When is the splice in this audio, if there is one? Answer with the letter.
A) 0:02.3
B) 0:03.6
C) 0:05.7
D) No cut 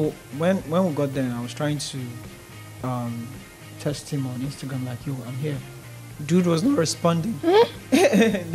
D